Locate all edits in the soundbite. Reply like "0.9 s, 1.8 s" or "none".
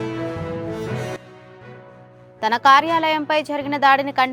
1.1 s